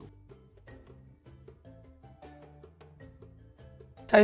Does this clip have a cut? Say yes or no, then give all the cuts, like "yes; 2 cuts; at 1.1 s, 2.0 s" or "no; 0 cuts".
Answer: no; 0 cuts